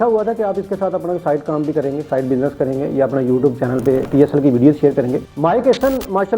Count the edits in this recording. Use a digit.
1